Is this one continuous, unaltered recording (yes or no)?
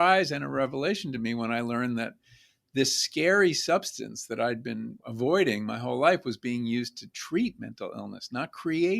no